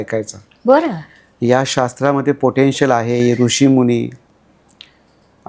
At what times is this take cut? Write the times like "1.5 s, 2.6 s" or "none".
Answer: none